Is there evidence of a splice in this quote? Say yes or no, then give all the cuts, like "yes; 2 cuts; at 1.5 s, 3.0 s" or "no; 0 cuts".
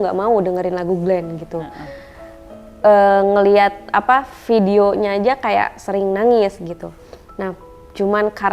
no; 0 cuts